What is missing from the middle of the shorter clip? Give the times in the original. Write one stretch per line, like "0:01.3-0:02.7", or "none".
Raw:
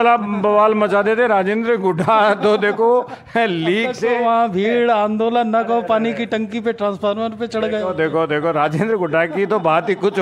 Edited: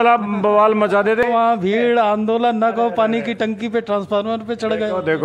0:01.2-0:04.2